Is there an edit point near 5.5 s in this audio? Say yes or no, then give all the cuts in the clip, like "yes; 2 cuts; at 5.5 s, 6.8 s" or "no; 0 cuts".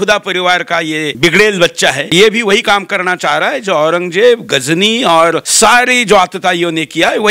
yes; 3 cuts; at 1.1 s, 2.1 s, 5.5 s